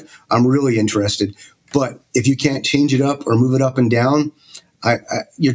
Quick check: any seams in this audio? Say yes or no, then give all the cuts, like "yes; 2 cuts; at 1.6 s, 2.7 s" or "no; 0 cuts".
no; 0 cuts